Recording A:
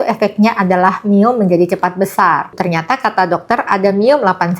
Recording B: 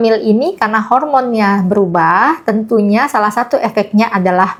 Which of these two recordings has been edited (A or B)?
A